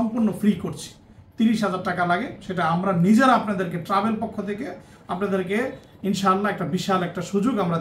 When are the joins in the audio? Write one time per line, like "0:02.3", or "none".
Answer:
none